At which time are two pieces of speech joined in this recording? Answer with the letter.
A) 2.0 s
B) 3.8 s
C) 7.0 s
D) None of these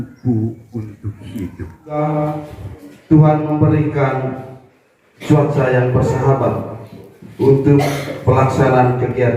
A